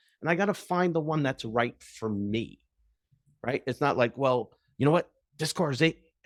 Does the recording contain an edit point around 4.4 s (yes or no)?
no